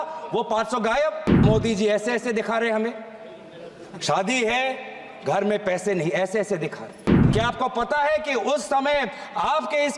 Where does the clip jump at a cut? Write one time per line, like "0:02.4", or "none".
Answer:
0:01.4
0:07.1